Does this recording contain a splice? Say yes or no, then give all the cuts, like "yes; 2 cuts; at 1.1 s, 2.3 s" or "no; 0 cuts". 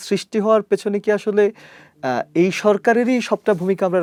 no; 0 cuts